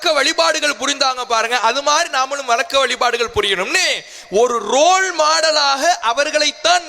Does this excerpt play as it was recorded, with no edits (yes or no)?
yes